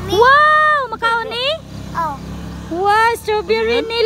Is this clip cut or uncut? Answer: uncut